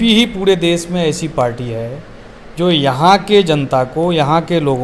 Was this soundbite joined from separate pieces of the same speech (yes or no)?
no